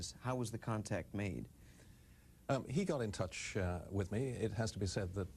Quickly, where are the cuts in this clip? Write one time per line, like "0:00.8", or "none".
0:02.6